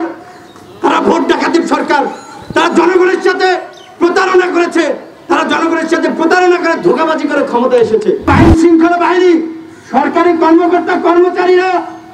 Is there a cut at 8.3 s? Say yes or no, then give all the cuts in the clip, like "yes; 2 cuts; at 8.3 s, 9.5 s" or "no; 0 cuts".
yes; 1 cut; at 8.3 s